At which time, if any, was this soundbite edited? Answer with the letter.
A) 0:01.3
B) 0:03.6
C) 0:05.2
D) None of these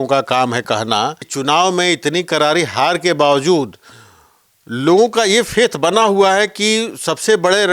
A